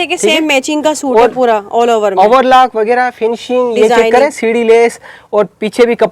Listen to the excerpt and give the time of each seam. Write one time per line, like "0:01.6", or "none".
none